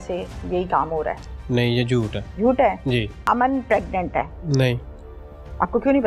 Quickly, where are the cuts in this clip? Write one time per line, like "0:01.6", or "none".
0:02.2
0:03.2
0:04.4